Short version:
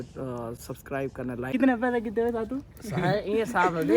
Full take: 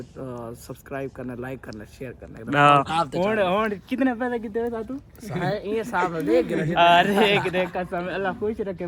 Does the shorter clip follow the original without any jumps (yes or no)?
no